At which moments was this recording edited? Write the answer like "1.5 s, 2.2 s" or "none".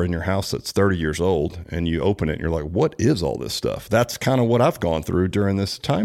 none